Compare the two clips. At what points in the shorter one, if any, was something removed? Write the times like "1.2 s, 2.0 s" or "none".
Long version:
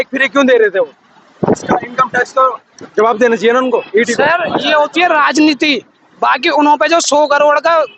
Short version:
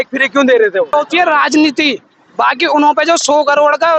0.9 s